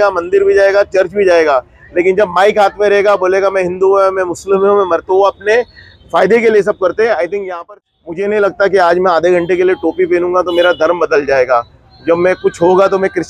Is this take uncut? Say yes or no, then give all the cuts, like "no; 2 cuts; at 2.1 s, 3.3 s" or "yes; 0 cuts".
no; 1 cut; at 7.5 s